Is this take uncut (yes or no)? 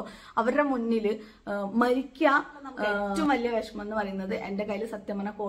no